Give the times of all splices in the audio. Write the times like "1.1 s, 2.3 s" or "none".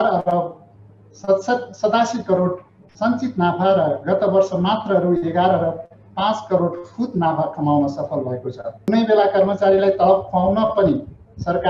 8.8 s

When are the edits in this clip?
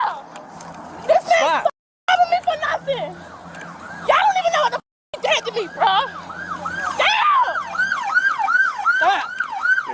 none

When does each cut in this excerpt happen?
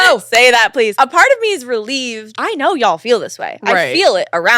1.0 s, 2.3 s

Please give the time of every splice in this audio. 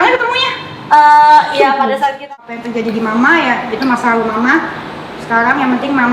2.2 s

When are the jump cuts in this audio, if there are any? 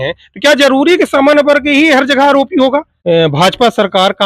2.9 s

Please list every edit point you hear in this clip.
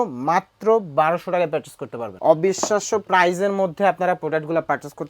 2.1 s

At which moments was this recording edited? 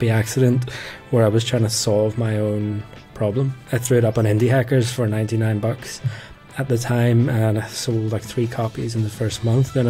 3.6 s

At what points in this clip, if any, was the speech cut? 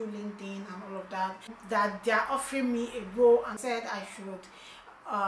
1.5 s, 3.6 s

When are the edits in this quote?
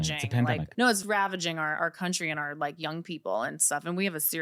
1.0 s

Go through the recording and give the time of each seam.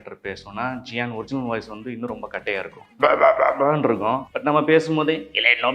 2.8 s, 4.3 s

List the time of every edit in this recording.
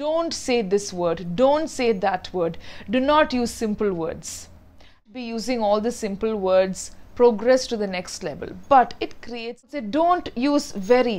5.0 s, 9.6 s

